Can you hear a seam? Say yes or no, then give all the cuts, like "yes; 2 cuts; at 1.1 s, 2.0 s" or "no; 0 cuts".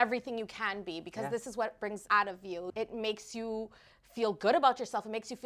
yes; 1 cut; at 2.4 s